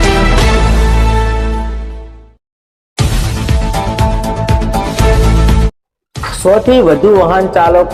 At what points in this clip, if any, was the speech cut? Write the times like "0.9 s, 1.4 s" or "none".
1.1 s, 5.7 s